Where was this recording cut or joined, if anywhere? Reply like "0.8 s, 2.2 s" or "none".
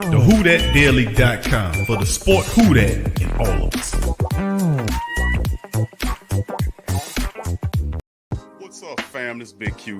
8.2 s